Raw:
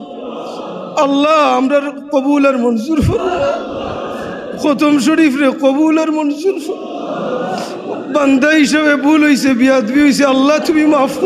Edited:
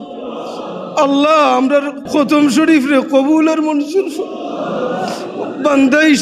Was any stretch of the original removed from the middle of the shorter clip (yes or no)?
yes